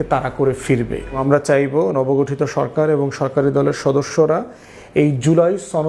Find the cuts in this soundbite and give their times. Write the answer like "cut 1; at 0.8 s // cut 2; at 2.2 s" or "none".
cut 1; at 1.2 s